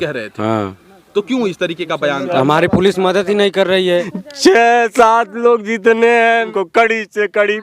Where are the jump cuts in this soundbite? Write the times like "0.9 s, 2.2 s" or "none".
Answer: 4.1 s, 6.5 s